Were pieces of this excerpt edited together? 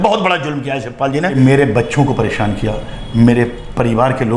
yes; 1 cut; at 1.3 s

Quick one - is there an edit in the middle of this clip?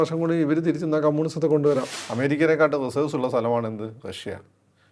yes; 1 cut; at 2.0 s

